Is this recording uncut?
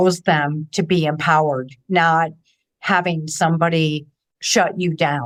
yes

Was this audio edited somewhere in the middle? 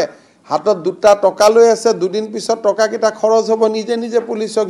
no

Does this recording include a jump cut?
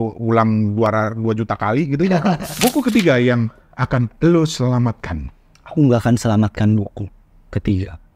yes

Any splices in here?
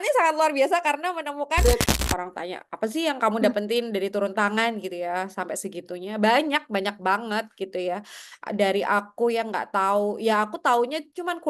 yes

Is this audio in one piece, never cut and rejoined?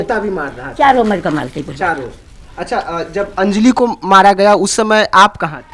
yes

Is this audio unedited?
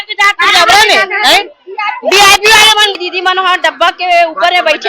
no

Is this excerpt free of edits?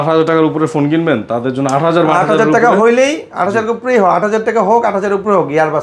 yes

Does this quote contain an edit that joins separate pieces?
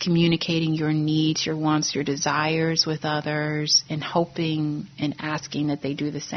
no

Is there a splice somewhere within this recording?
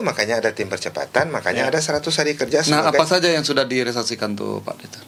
no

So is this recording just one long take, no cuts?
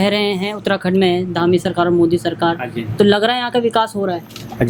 yes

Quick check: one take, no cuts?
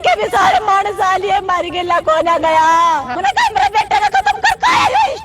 no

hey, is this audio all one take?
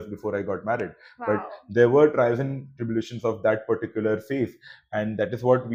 yes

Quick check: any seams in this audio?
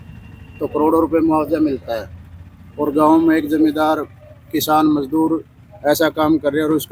no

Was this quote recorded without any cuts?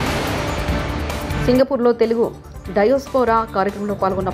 no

